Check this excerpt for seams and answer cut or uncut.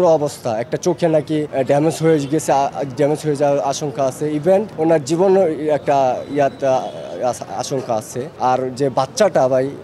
cut